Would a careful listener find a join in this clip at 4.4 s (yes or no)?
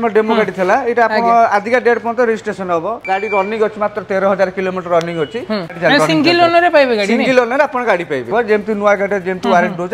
no